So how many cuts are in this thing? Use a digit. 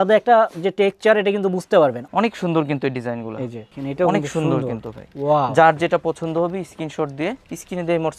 2